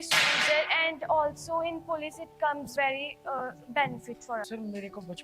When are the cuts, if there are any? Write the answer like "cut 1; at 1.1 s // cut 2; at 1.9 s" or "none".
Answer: cut 1; at 2.7 s // cut 2; at 4.5 s